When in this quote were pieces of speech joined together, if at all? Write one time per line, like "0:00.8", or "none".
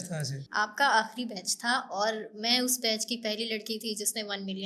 none